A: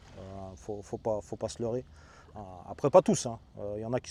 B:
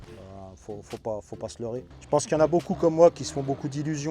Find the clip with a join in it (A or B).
B